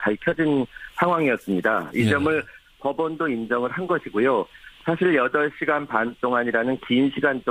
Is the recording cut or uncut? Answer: uncut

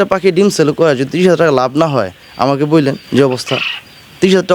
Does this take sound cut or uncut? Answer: uncut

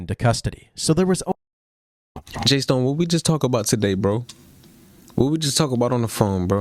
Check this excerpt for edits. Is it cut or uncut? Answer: uncut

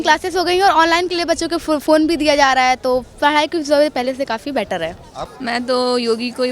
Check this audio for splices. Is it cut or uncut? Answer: cut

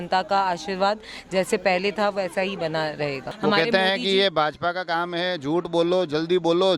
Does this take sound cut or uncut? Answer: cut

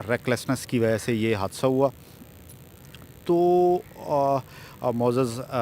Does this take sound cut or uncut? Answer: uncut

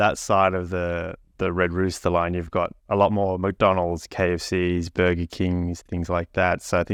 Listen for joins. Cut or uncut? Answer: uncut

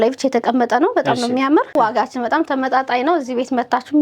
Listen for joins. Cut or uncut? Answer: cut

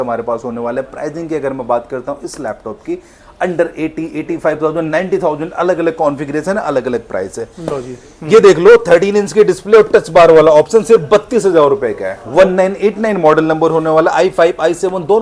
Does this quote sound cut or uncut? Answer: uncut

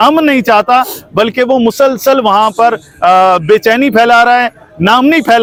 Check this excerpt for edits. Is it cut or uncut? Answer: uncut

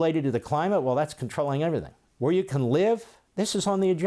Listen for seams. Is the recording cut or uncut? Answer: cut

